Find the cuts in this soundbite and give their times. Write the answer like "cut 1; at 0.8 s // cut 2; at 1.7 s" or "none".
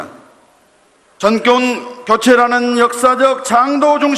cut 1; at 1.4 s